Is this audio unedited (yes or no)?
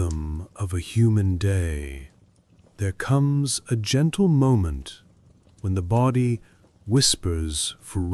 yes